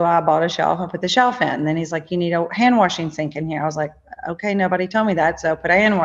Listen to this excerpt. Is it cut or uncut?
uncut